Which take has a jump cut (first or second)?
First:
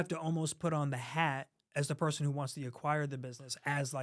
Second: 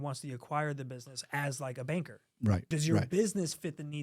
second